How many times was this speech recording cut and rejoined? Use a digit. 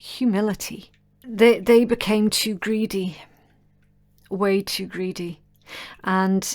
1